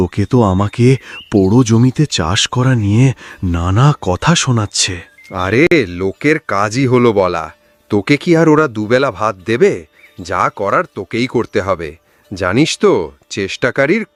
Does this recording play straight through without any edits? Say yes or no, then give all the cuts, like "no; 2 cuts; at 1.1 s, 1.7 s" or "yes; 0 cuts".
yes; 0 cuts